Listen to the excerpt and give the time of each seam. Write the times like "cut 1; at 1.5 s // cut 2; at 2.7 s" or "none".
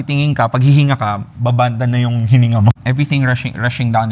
cut 1; at 2.7 s